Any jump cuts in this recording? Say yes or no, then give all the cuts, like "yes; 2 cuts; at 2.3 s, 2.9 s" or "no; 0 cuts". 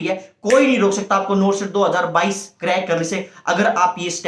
no; 0 cuts